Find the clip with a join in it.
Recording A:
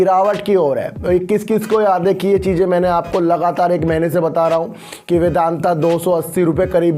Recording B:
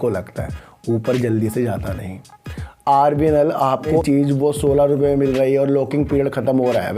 B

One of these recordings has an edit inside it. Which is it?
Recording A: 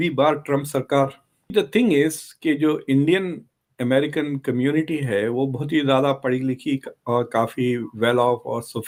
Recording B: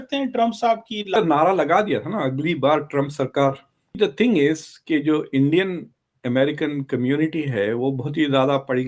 B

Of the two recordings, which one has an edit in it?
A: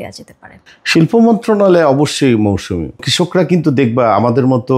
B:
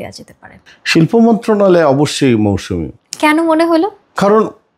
A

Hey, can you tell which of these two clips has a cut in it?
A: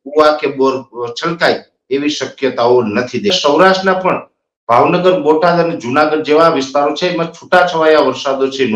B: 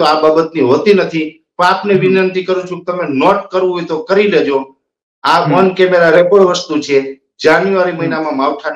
A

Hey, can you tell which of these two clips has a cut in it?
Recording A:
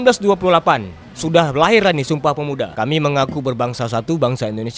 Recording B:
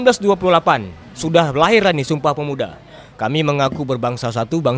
A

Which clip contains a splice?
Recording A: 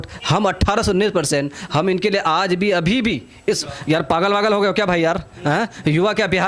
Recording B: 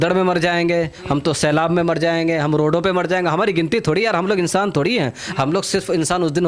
A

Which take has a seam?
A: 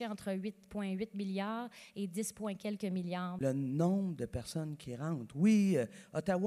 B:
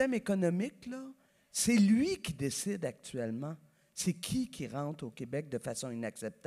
A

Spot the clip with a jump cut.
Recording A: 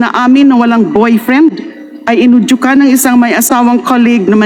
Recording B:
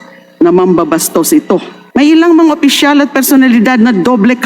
B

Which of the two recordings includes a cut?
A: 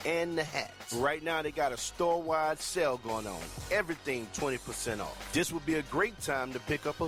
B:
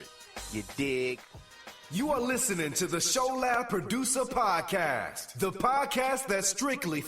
B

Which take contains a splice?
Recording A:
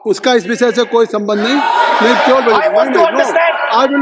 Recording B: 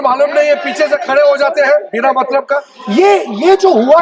B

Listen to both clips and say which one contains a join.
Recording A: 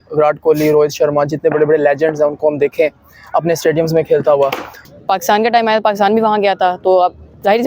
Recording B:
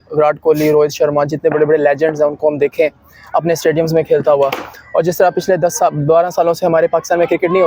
A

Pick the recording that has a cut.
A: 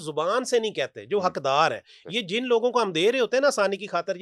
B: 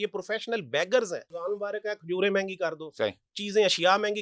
B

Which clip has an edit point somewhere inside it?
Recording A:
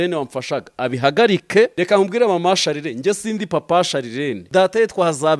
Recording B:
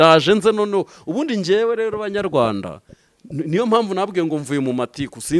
A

